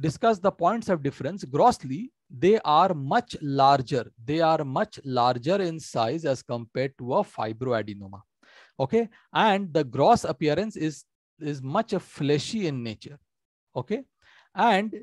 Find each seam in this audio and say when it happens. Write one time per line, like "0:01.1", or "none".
none